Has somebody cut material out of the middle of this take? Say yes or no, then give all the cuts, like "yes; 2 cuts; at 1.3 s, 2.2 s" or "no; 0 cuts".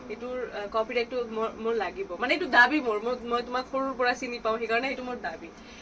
no; 0 cuts